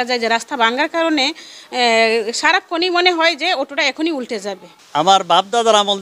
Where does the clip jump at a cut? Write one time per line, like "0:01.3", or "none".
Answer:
0:04.7